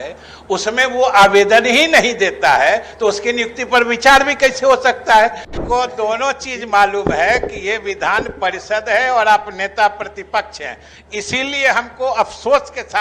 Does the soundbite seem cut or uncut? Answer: cut